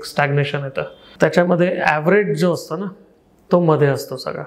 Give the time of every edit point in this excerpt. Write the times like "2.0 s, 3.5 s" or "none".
1.0 s

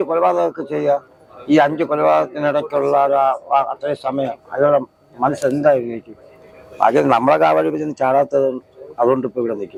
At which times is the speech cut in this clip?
none

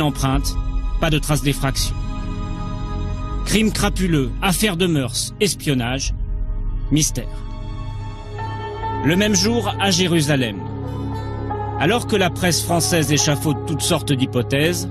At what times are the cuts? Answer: 5.1 s

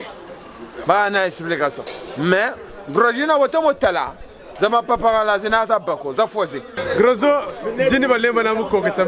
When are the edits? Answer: 6.7 s

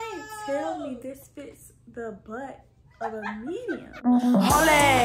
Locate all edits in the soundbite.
4.1 s

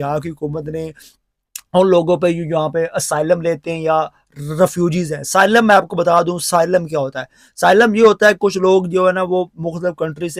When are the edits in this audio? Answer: none

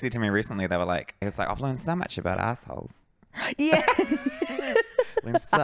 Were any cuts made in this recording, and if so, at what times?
1.3 s

